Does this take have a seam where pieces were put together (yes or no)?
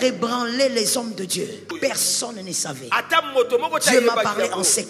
yes